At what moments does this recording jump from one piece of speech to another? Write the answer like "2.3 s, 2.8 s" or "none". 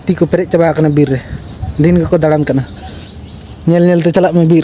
none